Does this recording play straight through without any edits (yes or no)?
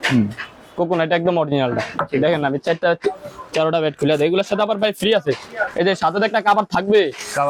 yes